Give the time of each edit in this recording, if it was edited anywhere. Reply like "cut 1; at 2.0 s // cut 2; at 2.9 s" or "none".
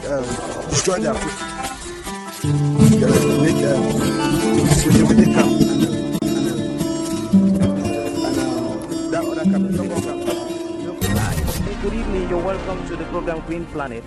cut 1; at 11.0 s